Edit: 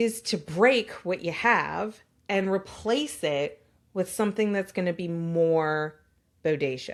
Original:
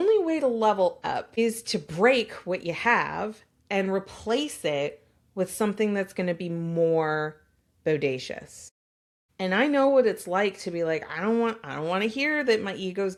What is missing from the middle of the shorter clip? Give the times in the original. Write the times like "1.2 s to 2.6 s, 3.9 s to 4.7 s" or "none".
none